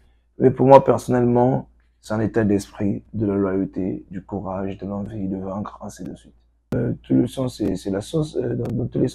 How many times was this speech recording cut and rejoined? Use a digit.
1